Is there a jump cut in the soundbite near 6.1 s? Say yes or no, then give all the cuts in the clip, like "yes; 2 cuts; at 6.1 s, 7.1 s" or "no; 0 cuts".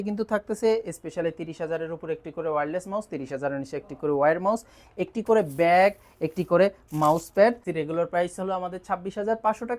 no; 1 cut; at 7.6 s